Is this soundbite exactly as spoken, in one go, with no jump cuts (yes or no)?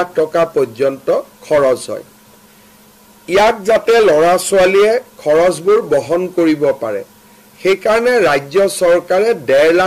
yes